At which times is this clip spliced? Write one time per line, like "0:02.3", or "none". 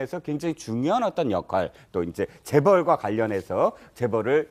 0:02.4